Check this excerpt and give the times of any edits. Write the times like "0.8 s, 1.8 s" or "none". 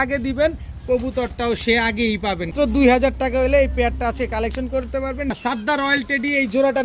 2.5 s, 5.3 s